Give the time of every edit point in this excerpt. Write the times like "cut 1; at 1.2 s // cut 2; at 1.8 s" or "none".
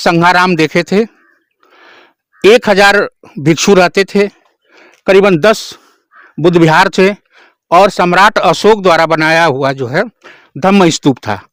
none